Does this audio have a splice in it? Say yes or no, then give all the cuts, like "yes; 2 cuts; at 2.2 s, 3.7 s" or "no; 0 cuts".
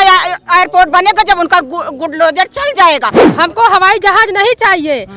yes; 1 cut; at 3.2 s